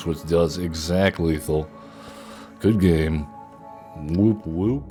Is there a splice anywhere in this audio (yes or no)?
no